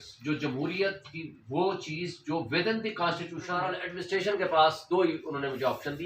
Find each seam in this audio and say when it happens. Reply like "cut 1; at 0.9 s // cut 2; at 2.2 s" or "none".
cut 1; at 3.8 s